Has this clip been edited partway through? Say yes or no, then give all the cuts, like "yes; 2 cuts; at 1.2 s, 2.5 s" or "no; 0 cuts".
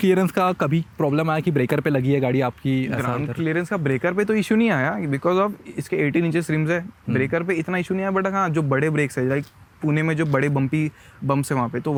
no; 0 cuts